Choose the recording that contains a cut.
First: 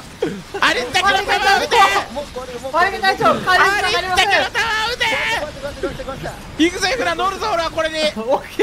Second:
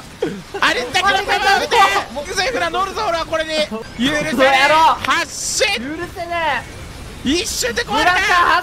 second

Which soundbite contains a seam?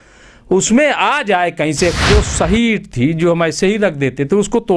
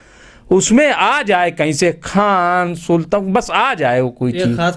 first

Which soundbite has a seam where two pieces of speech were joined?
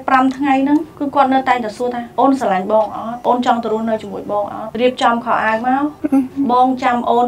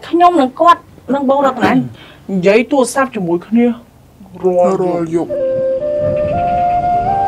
first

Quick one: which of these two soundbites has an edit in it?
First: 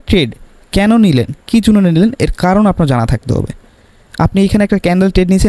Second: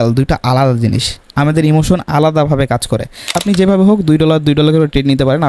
second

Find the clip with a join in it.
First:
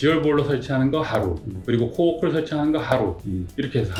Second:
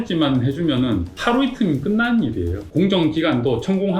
second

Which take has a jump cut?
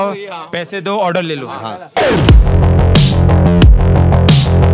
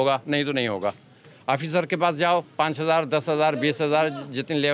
first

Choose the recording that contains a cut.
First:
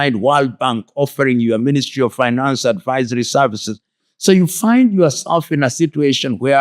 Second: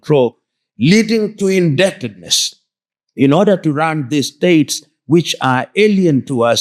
first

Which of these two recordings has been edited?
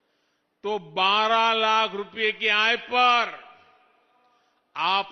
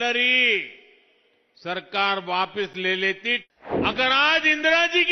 second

